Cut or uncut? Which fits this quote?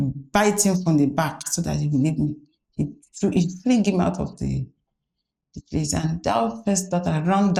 uncut